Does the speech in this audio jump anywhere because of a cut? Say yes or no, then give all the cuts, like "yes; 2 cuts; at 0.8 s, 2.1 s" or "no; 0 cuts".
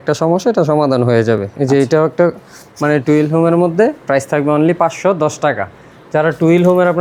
no; 0 cuts